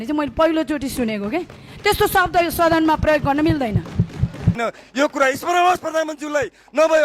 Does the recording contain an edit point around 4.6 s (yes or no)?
yes